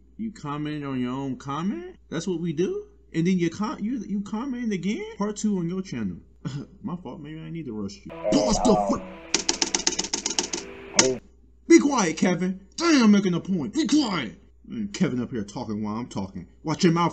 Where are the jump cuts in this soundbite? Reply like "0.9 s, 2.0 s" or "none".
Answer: 2.0 s, 5.1 s, 8.1 s